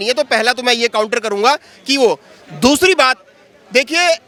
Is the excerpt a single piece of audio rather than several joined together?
yes; 0 cuts

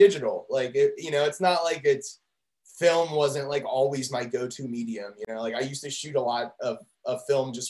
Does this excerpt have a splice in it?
yes; 1 cut; at 5.2 s

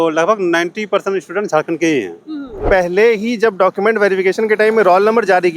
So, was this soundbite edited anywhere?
yes; 1 cut; at 2.5 s

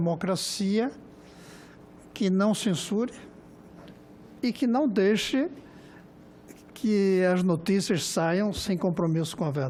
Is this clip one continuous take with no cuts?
yes; 0 cuts

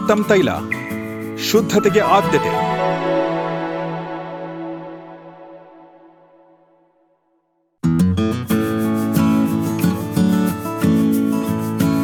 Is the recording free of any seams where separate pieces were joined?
yes; 0 cuts

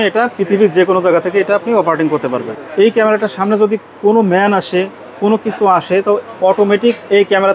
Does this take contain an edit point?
yes; 1 cut; at 2.5 s

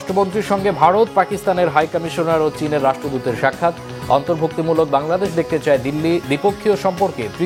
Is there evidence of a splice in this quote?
no; 0 cuts

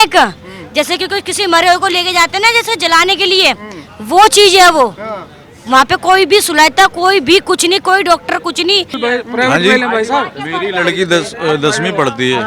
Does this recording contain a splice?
yes; 1 cut; at 9.0 s

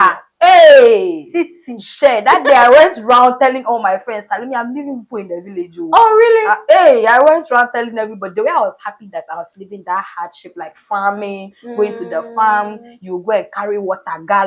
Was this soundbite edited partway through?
no; 0 cuts

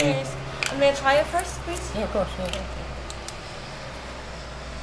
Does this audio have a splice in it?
no; 0 cuts

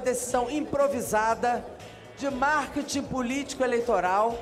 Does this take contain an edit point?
no; 0 cuts

